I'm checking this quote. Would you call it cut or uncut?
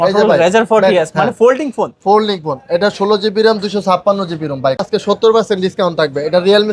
cut